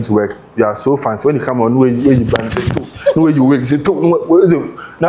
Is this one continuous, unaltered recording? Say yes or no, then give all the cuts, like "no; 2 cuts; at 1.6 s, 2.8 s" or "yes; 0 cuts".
yes; 0 cuts